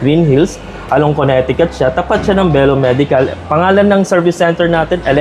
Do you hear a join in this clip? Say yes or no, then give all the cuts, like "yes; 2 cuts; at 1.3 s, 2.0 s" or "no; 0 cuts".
no; 0 cuts